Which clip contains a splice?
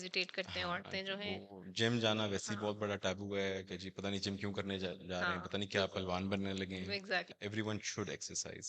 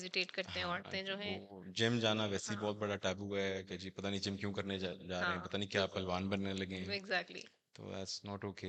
first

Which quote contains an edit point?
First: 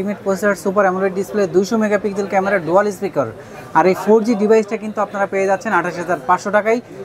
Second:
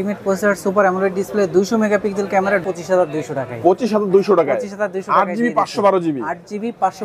second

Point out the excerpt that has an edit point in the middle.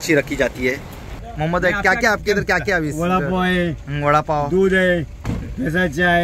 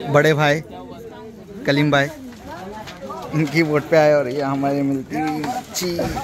first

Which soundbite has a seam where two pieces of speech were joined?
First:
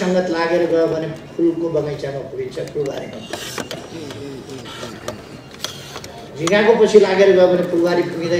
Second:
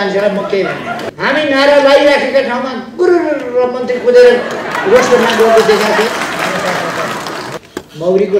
second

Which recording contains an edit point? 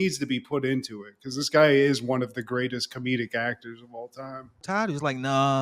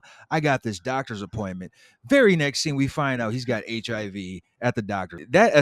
first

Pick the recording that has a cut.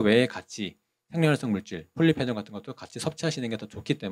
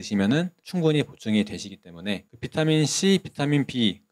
second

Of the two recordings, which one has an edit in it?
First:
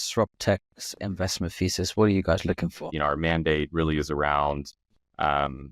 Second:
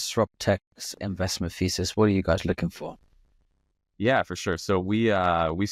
first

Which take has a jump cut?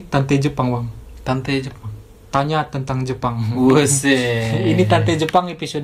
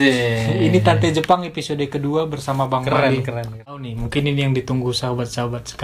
second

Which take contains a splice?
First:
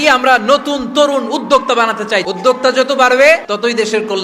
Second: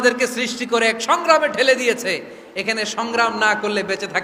first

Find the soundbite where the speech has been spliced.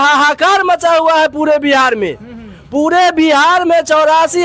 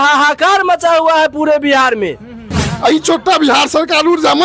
second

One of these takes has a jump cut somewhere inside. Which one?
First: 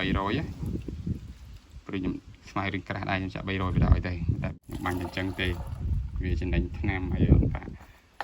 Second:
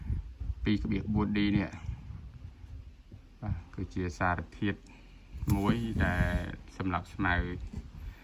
first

